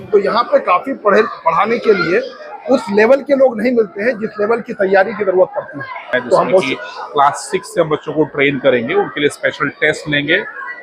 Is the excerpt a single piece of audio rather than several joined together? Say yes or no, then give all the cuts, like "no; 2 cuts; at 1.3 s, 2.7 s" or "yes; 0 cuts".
no; 1 cut; at 6.7 s